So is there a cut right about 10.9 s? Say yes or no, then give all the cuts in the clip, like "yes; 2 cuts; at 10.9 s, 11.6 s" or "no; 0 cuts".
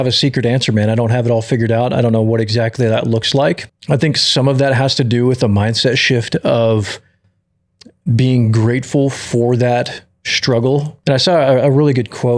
yes; 2 cuts; at 3.6 s, 10.9 s